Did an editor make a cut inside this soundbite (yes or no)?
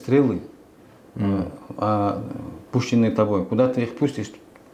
no